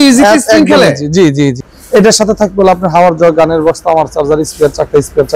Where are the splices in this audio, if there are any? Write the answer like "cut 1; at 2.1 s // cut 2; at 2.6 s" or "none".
cut 1; at 1.7 s